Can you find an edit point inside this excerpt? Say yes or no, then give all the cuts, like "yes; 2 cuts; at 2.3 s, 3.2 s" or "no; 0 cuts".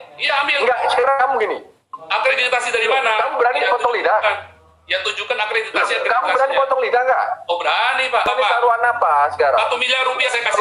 yes; 1 cut; at 8.3 s